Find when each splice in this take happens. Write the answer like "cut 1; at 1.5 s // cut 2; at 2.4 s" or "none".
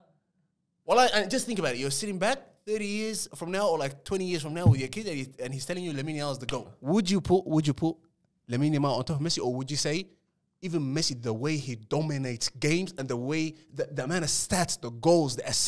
cut 1; at 6.7 s